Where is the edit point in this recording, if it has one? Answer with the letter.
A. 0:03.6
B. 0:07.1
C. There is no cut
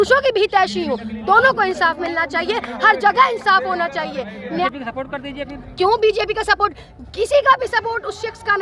C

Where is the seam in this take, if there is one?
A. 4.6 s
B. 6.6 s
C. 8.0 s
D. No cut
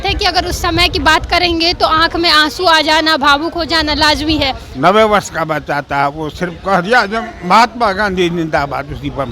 A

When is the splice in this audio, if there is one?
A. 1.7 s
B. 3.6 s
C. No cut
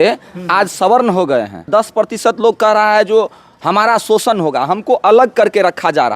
A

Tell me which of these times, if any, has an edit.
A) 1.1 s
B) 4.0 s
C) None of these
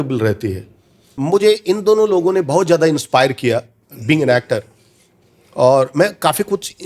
A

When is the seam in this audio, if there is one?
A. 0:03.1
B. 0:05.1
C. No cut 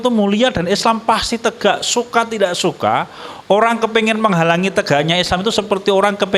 C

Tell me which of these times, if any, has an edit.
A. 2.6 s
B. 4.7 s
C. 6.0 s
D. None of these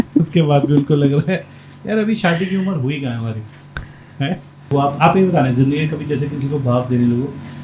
B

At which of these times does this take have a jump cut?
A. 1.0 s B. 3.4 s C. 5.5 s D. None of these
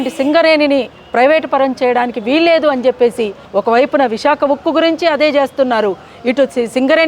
B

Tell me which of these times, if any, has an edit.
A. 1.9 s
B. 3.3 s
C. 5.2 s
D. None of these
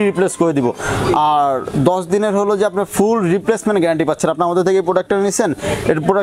D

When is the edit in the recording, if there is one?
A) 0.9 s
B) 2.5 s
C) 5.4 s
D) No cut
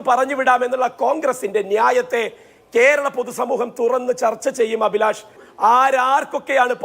C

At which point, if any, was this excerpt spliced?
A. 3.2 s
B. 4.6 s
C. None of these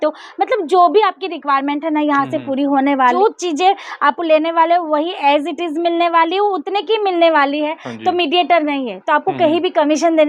A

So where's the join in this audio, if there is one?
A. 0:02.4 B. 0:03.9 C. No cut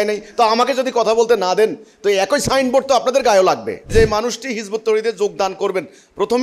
B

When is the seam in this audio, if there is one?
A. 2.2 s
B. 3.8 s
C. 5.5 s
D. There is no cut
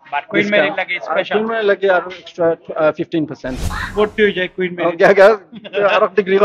B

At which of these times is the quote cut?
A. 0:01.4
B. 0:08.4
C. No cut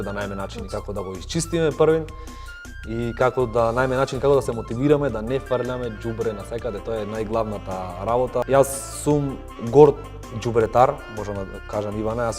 B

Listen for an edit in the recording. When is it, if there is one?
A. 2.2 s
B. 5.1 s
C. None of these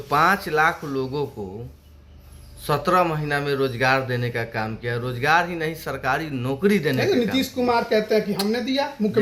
C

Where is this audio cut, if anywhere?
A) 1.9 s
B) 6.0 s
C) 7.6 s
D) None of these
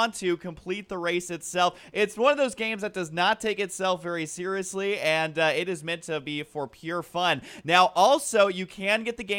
C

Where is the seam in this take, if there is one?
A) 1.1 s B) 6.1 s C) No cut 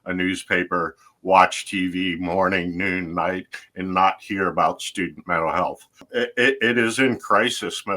B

